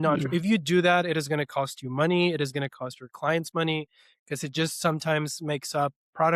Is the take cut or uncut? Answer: uncut